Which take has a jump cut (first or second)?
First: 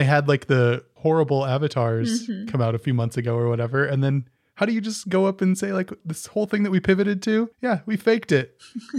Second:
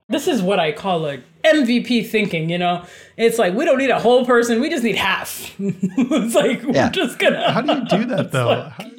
first